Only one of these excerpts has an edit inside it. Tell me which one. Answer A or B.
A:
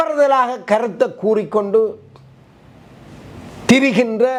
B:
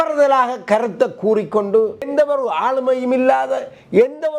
B